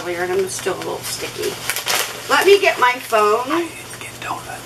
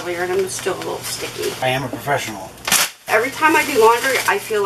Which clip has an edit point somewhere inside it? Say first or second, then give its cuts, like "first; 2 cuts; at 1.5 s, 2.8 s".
second; 2 cuts; at 1.6 s, 3.1 s